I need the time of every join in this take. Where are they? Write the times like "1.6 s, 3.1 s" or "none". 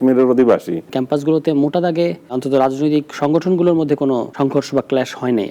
0.9 s, 2.4 s, 4.3 s

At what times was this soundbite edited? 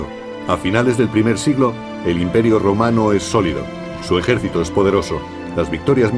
3.1 s

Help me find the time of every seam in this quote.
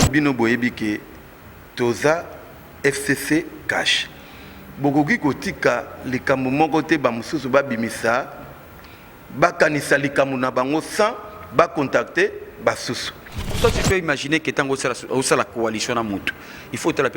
13.6 s

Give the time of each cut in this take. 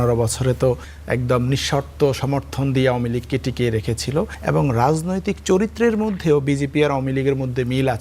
0.9 s, 4.4 s

